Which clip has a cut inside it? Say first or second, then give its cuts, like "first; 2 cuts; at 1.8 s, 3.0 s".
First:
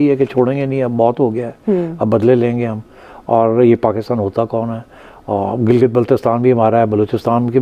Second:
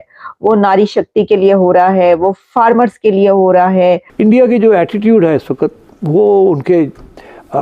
second; 1 cut; at 4.1 s